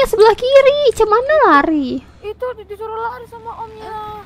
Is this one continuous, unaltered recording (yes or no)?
yes